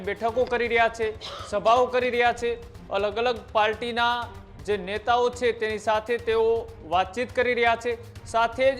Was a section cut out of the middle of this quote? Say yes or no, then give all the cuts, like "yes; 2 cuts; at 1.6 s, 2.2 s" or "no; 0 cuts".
no; 0 cuts